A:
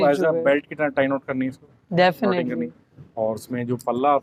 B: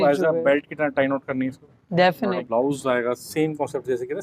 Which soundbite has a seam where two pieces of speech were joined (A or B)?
B